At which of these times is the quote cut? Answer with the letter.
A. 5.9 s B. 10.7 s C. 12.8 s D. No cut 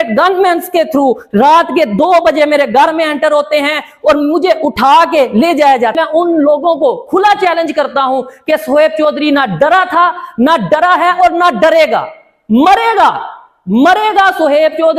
A